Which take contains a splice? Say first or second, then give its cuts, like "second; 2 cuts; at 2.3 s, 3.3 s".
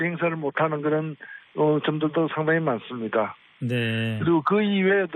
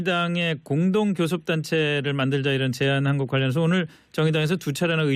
second; 1 cut; at 2.0 s